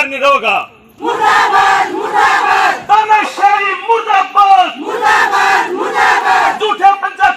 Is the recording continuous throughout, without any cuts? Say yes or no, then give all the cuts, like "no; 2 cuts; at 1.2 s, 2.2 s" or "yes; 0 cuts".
no; 1 cut; at 1.0 s